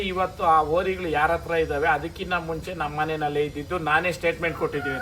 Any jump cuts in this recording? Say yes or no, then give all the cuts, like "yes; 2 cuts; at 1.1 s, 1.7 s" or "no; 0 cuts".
no; 0 cuts